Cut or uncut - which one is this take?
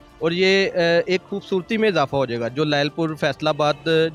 uncut